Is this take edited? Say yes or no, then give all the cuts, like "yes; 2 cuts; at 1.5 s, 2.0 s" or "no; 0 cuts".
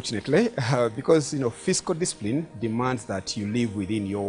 yes; 1 cut; at 2.0 s